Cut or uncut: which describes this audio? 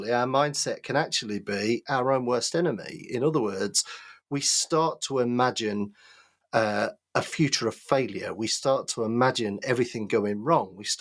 uncut